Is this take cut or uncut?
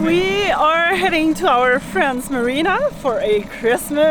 uncut